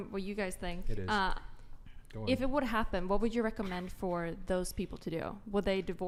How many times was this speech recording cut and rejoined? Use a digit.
0